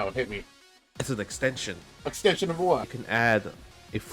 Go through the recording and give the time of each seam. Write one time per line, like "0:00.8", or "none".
0:02.2
0:03.0